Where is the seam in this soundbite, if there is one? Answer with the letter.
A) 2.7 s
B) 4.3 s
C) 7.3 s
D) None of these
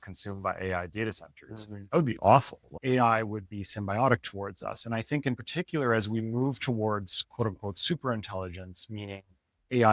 A